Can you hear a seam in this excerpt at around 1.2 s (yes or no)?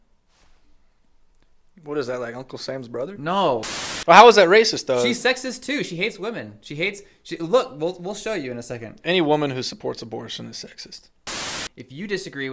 no